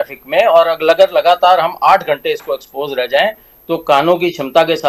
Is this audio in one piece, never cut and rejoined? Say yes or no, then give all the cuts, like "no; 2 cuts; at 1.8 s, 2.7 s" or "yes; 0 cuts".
yes; 0 cuts